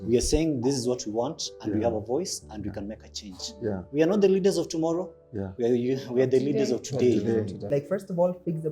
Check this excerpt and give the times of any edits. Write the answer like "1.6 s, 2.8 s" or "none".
7.7 s